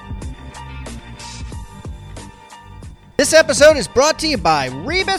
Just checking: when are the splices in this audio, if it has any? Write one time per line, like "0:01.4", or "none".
0:01.1
0:03.0